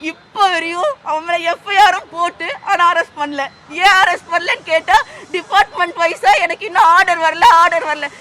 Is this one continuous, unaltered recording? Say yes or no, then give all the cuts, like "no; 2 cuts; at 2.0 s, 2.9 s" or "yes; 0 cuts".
yes; 0 cuts